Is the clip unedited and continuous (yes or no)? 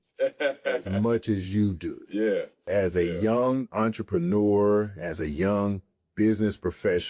no